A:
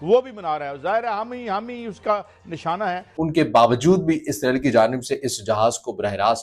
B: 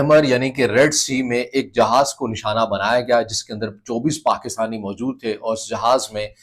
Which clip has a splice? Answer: A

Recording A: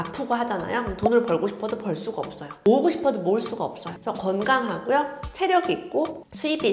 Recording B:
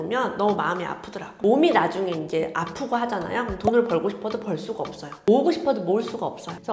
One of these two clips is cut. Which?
B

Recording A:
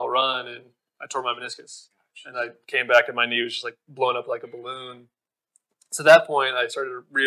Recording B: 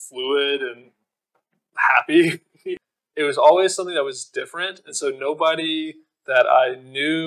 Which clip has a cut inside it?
B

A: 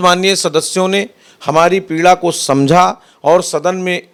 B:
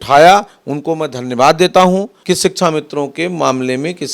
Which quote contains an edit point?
B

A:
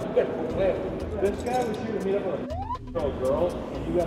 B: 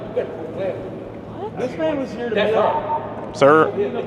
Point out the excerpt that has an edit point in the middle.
A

